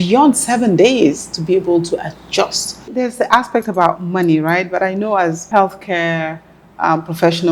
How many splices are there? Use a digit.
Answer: 2